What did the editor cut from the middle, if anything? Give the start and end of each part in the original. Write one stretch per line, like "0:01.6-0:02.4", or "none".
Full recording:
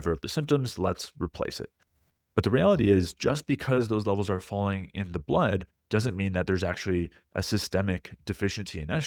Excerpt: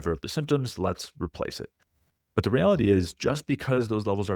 none